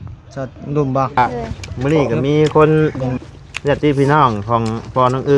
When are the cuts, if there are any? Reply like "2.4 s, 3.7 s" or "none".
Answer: 1.2 s